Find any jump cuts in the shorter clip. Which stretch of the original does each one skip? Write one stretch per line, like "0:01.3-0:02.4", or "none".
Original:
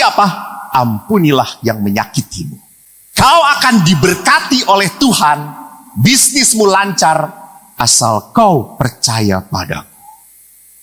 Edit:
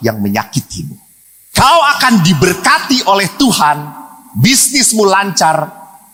none